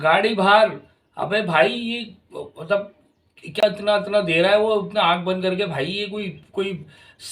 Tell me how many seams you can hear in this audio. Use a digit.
1